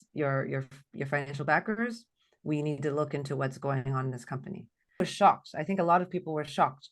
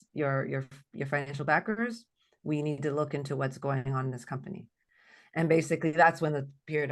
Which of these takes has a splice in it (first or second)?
first